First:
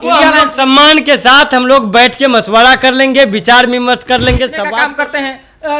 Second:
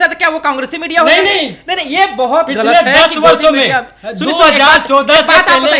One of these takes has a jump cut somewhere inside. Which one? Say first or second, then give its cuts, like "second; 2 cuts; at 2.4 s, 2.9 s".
first; 1 cut; at 4.7 s